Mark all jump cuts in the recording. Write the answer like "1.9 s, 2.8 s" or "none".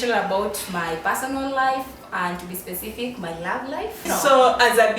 4.0 s